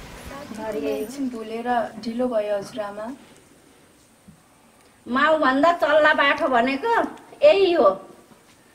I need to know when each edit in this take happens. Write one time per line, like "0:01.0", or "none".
0:01.1